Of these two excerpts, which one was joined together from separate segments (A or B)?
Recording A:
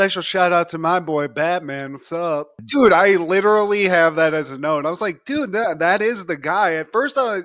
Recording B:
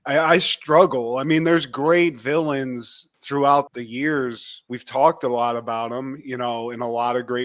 A